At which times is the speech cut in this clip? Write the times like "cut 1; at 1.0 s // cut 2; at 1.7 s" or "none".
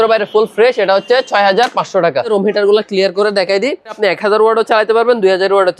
cut 1; at 2.3 s // cut 2; at 3.9 s